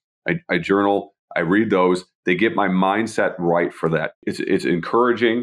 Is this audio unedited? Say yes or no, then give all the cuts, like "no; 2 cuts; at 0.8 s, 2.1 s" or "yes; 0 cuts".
no; 1 cut; at 4.3 s